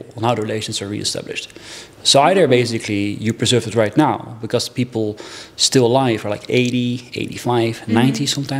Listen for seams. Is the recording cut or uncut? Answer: uncut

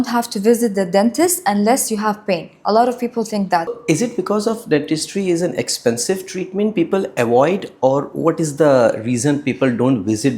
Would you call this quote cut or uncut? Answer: cut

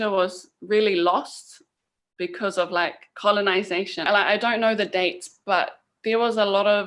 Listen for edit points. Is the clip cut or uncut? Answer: cut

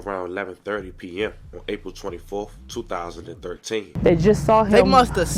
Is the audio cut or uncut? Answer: cut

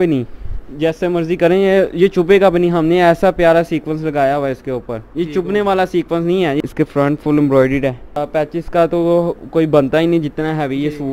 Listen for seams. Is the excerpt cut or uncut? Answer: cut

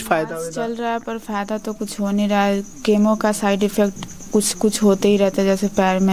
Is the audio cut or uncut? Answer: uncut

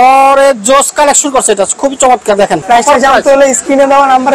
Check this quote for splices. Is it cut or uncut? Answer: cut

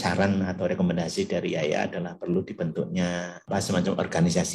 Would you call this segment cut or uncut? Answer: cut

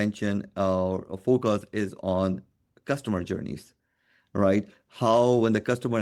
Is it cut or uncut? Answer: uncut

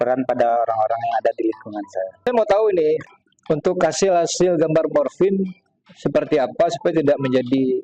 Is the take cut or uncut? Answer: cut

